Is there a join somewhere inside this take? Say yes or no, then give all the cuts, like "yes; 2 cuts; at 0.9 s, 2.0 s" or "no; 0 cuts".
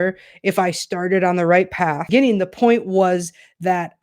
yes; 1 cut; at 2.0 s